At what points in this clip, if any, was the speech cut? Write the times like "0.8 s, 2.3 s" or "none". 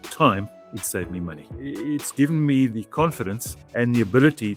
none